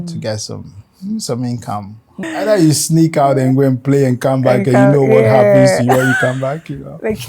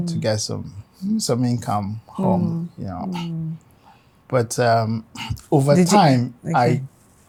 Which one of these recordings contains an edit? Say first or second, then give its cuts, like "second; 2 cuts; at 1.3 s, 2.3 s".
first; 1 cut; at 2.1 s